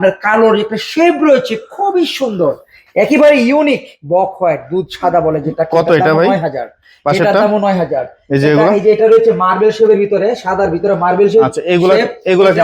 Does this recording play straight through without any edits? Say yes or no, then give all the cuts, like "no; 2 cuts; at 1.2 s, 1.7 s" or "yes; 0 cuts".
yes; 0 cuts